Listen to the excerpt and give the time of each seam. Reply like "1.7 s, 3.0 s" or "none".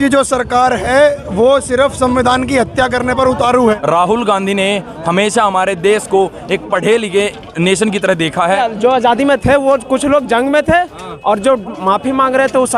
3.8 s, 8.6 s